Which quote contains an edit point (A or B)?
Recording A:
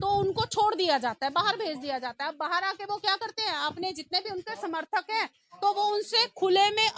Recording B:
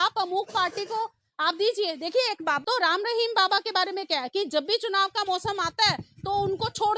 B